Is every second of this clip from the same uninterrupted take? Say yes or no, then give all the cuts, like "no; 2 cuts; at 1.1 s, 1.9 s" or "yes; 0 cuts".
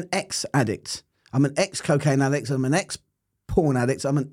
yes; 0 cuts